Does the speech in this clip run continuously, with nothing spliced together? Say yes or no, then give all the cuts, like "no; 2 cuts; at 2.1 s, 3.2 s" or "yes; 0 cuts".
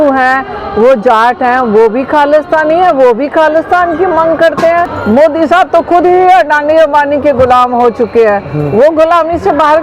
no; 1 cut; at 4.9 s